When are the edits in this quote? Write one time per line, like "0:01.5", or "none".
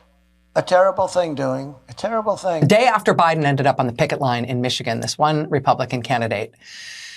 0:02.6